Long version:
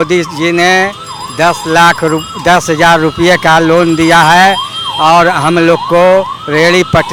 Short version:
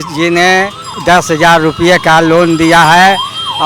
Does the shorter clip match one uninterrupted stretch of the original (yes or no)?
no